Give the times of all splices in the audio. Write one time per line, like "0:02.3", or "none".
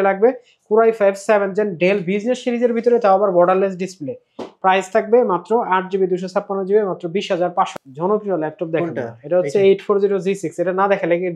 0:07.7